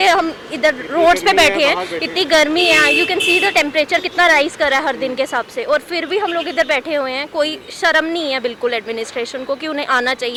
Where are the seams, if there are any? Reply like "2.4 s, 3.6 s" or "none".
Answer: none